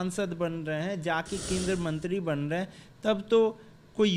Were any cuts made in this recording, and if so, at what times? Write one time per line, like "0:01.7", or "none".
none